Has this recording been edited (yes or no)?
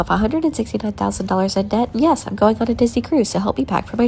no